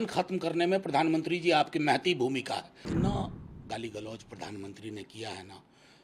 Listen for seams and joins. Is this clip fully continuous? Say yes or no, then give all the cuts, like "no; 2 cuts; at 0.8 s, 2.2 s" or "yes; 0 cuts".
no; 1 cut; at 2.8 s